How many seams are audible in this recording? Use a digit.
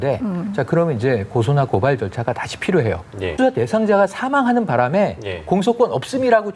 1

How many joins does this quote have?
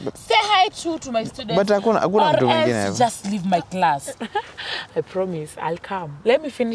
1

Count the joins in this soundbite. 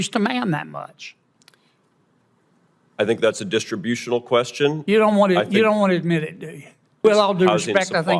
1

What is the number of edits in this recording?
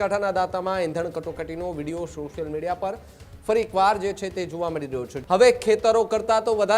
1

